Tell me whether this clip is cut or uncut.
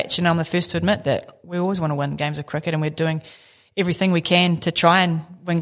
uncut